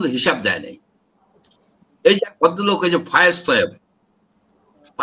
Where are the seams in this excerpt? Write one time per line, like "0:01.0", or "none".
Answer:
none